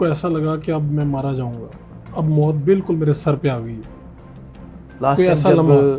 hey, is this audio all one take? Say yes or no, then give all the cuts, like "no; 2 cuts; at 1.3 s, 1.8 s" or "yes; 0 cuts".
yes; 0 cuts